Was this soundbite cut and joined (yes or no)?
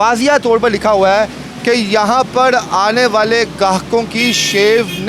no